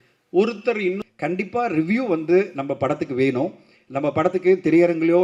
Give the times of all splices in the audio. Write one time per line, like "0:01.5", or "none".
0:01.0